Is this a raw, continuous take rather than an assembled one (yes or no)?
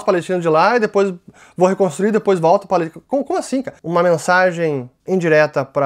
no